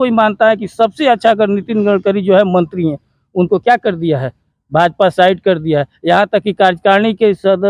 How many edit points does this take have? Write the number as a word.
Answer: zero